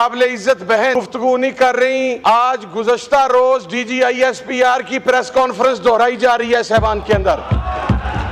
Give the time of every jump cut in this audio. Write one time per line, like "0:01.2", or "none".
0:00.9
0:02.2